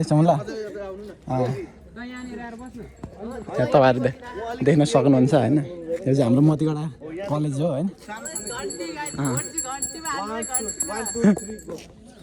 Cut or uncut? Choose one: uncut